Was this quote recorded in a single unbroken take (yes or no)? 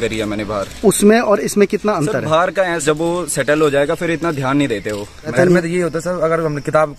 no